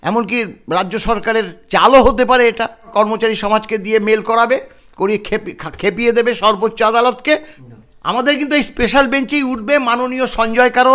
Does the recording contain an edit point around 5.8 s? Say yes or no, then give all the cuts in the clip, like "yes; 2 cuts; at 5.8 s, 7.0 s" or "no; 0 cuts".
no; 2 cuts; at 2.9 s, 7.6 s